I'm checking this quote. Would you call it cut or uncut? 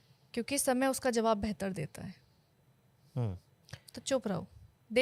uncut